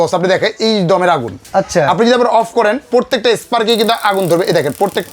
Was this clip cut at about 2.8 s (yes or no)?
no